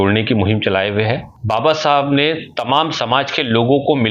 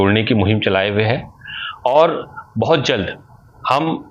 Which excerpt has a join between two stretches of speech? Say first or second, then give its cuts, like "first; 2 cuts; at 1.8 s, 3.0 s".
first; 1 cut; at 1.3 s